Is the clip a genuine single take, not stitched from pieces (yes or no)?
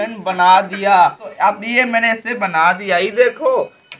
no